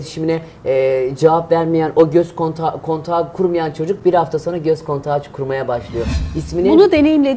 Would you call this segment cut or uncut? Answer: uncut